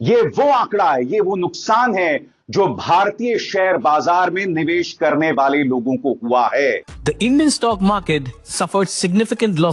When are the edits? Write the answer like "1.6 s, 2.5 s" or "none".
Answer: 6.9 s